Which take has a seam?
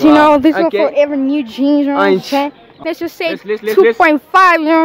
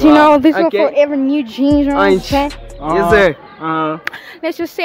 first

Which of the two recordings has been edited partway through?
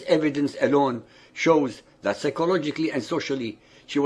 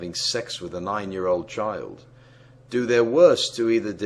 first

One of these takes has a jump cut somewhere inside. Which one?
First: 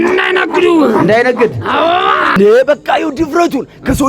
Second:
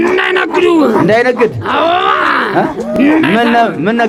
first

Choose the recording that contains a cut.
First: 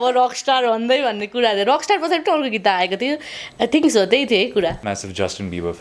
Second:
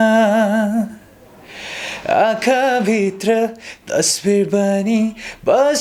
first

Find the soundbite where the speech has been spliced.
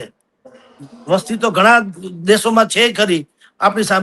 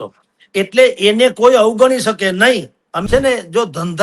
second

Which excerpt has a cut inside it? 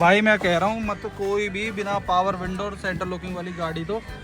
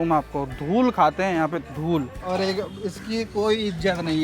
second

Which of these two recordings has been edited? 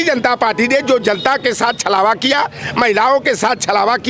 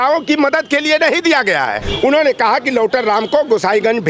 second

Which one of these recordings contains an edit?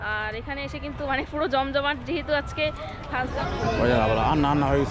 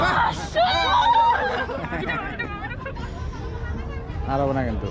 first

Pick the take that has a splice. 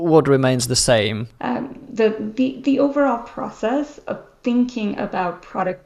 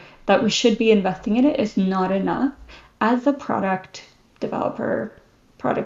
first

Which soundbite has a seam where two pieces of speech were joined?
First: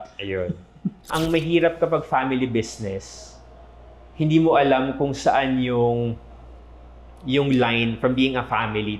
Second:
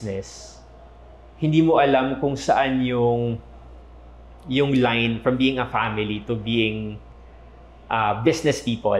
first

